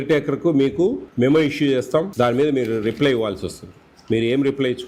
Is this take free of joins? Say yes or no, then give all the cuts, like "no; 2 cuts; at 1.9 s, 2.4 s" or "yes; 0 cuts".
no; 2 cuts; at 1.0 s, 2.1 s